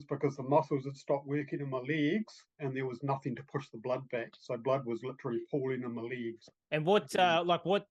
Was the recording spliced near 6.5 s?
yes; 1 cut; at 6.5 s

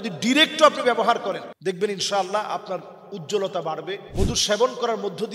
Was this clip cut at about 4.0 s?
yes; 2 cuts; at 1.5 s, 4.0 s

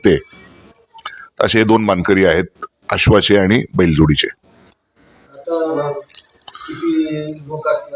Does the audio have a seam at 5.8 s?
yes; 1 cut; at 5.8 s

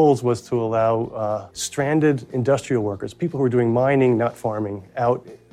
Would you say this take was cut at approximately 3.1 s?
no; 1 cut; at 1.6 s

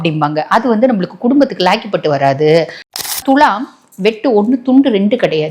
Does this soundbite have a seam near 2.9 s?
yes; 1 cut; at 2.9 s

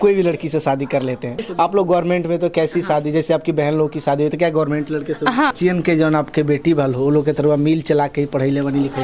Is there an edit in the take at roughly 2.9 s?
no; 2 cuts; at 1.4 s, 5.5 s

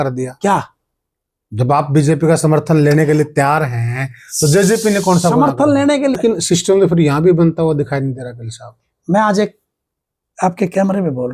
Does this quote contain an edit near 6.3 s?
yes; 1 cut; at 6.3 s

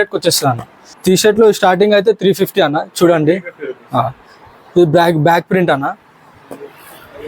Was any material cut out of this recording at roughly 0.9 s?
yes; 1 cut; at 0.9 s

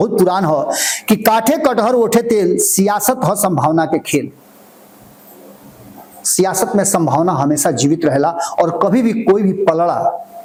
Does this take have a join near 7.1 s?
no; 0 cuts

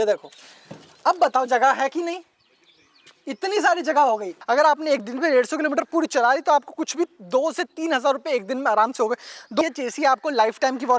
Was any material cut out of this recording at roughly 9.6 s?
yes; 2 cuts; at 4.3 s, 9.6 s

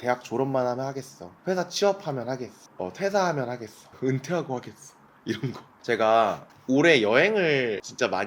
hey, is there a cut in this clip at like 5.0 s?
no; 0 cuts

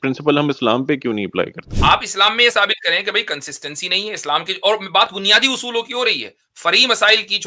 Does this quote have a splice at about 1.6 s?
yes; 1 cut; at 1.6 s

